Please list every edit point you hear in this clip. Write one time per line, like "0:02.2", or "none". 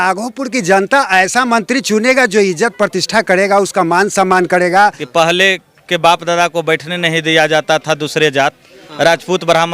0:05.0